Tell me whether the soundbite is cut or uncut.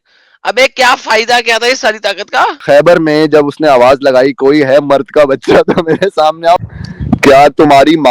cut